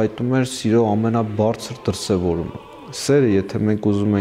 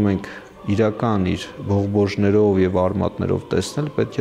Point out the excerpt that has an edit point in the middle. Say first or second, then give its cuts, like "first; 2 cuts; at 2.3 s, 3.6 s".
first; 1 cut; at 2.6 s